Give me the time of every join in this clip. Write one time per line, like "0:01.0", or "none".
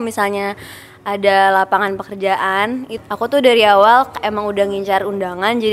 0:02.9